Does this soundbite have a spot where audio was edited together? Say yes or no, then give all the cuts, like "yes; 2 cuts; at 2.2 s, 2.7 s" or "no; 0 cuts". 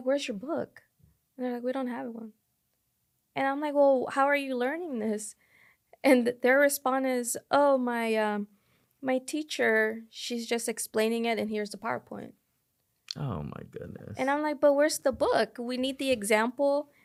no; 0 cuts